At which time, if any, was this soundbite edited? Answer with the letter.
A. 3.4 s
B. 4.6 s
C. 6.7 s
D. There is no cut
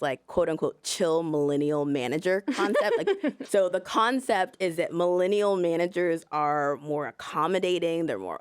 A